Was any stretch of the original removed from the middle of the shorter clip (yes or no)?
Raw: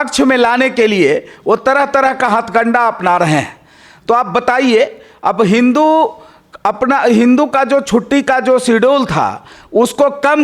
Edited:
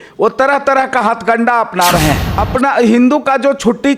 yes